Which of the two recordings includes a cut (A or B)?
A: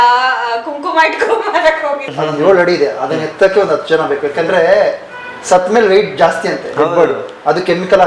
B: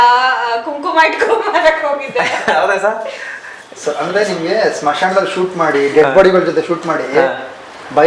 A